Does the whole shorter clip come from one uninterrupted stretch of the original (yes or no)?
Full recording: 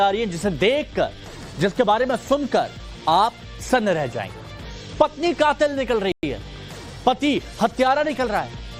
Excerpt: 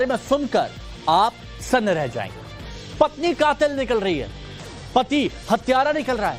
no